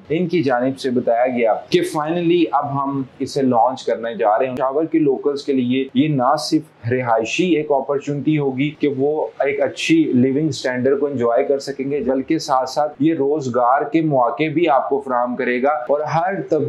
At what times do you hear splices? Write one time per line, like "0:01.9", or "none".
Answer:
0:04.5
0:05.9
0:08.7
0:12.0
0:12.9

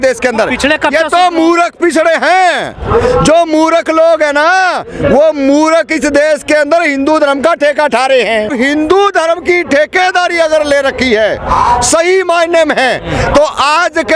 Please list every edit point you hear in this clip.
0:08.5

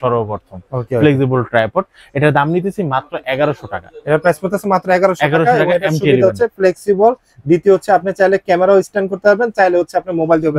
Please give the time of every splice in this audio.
none

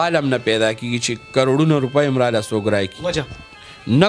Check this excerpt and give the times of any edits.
none

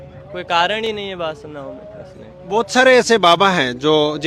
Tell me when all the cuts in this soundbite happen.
none

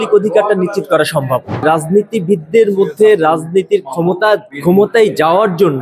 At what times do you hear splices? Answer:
0:01.6
0:04.5

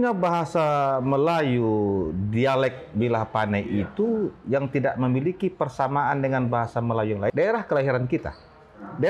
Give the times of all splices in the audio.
0:07.3

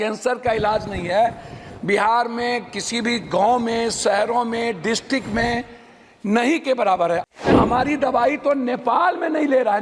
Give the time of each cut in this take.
0:07.3

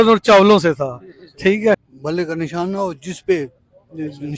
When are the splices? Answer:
0:01.9

